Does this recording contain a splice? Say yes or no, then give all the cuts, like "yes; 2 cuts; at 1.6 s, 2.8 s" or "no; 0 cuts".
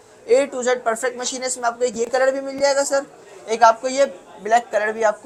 no; 0 cuts